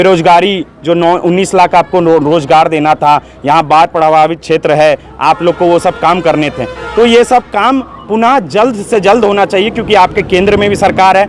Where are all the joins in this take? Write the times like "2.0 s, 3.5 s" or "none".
none